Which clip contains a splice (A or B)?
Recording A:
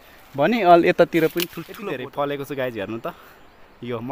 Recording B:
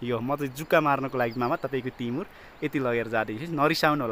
A